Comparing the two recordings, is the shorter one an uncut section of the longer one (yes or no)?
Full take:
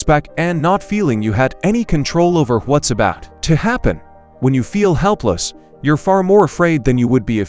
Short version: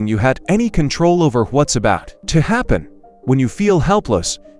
yes